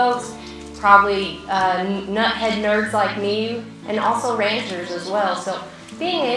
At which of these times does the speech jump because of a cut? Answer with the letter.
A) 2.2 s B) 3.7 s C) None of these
B